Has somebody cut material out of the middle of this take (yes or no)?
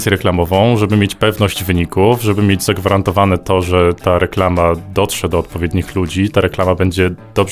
no